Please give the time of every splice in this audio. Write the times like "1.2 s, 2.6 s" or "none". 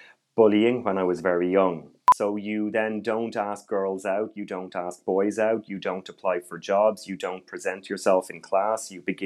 2.0 s